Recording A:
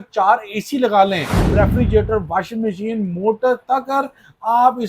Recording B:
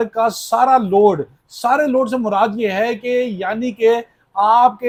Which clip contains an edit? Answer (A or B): A